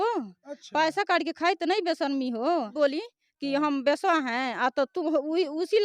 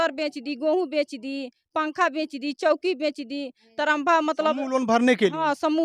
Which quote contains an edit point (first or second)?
first